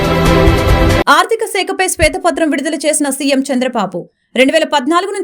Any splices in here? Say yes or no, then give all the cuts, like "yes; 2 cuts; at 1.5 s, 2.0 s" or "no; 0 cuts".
yes; 1 cut; at 0.9 s